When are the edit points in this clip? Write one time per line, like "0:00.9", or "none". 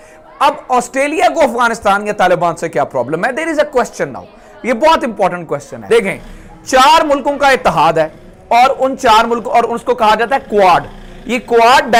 none